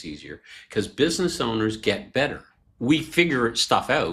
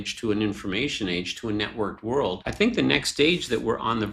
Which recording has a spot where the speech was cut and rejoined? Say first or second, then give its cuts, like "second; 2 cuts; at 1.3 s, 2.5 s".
second; 1 cut; at 2.4 s